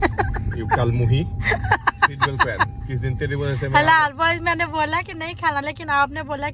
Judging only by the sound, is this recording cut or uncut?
uncut